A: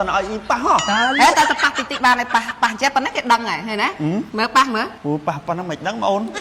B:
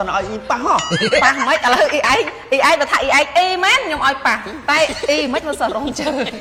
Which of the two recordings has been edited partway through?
A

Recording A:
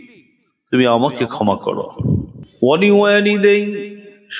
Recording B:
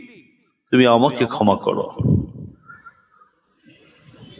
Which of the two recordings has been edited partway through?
A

